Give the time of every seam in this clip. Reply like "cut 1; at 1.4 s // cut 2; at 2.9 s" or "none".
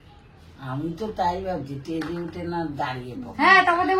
none